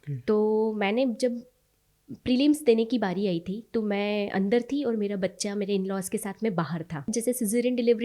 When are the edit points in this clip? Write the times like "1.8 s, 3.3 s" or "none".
7.1 s